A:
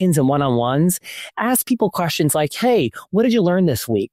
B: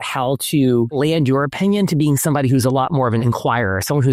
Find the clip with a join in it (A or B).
B